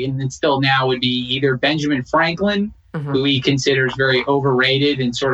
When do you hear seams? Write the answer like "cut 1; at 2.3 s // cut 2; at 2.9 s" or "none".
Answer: none